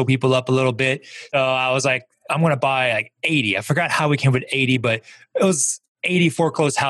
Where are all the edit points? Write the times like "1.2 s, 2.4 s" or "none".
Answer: 1.3 s